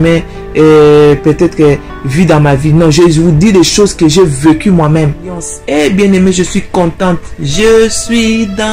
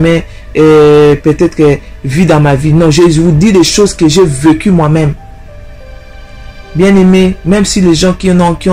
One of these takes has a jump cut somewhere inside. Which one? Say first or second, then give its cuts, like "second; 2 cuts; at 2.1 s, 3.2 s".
first; 1 cut; at 5.5 s